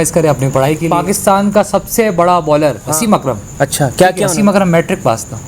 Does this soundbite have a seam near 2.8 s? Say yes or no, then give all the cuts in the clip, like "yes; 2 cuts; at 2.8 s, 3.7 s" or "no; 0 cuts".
yes; 3 cuts; at 0.8 s, 2.8 s, 4.3 s